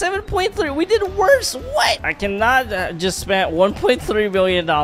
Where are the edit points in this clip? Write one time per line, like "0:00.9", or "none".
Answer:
0:02.0